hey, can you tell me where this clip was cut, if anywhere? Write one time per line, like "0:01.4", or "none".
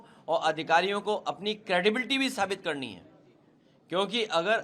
none